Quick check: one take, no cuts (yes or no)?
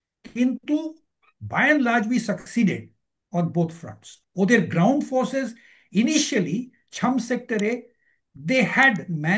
no